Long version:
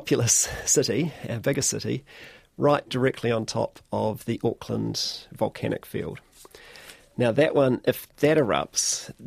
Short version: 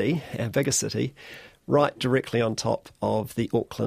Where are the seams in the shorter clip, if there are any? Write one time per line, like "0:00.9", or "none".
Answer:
none

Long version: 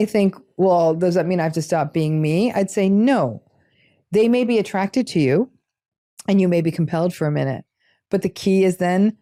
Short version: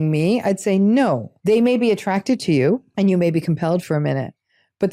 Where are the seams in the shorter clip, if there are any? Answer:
0:01.3
0:02.9

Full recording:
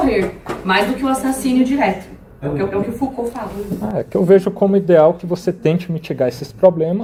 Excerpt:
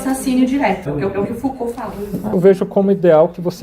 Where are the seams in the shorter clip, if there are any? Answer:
0:00.8
0:02.3

